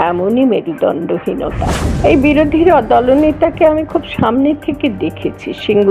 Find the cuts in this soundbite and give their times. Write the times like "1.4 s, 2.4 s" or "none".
1.8 s

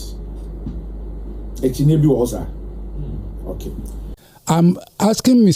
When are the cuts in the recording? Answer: 4.2 s

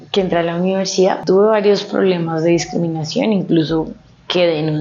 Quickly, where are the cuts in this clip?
1.2 s

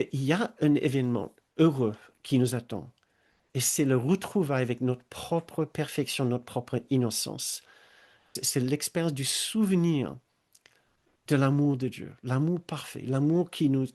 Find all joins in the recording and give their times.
8.4 s

